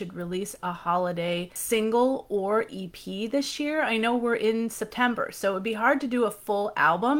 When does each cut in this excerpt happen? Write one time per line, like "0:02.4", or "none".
0:01.6